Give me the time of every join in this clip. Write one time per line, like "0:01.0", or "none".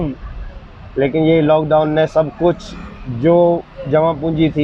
none